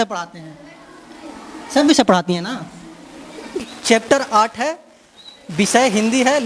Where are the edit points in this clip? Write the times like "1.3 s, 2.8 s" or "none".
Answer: 3.6 s